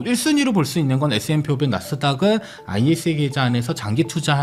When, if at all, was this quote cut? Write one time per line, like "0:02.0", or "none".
none